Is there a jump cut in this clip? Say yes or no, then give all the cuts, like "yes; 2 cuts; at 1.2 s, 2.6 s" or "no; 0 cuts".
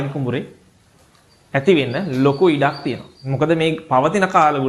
no; 0 cuts